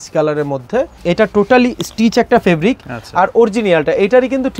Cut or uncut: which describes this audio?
cut